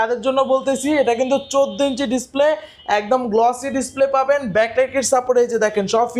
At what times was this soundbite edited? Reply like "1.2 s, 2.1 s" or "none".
none